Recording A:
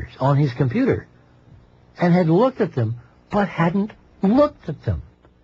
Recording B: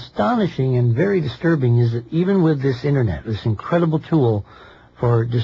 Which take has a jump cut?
A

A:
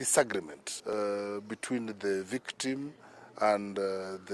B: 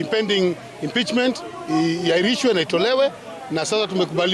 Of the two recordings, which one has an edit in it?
A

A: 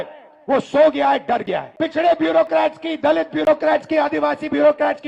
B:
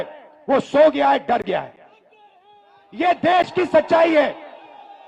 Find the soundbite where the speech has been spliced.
A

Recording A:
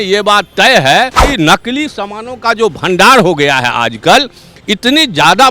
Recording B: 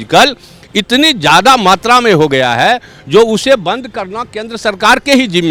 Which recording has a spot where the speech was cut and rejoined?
A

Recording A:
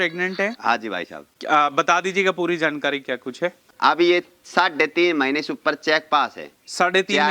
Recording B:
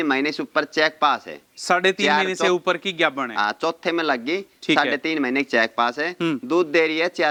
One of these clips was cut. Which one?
A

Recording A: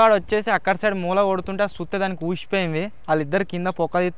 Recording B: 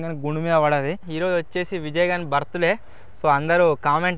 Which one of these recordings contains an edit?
B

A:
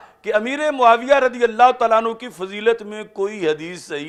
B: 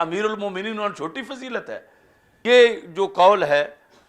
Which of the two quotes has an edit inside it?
B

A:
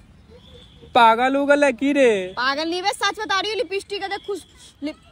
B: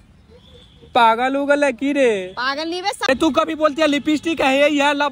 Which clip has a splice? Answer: B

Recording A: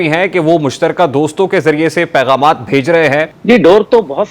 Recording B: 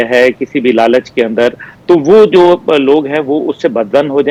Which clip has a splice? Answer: A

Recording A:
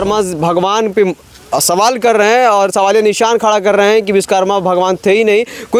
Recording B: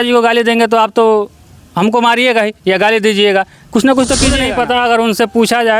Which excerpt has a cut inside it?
B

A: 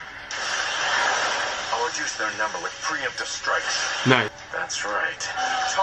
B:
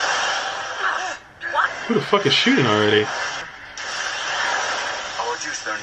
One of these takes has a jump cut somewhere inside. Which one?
B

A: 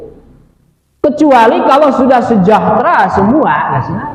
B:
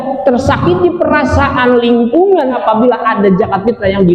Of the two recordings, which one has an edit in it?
B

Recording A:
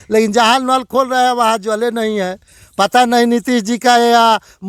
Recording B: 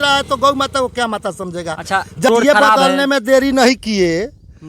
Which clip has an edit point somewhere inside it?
B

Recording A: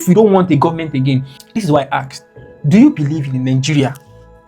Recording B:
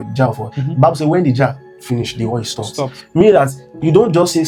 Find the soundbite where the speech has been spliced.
A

